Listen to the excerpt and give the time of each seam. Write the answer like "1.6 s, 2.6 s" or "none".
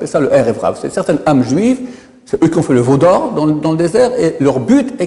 none